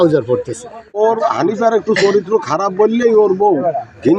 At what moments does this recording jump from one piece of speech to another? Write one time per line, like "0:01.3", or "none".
0:01.0